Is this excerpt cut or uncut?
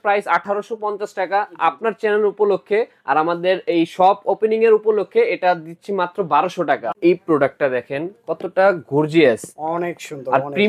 cut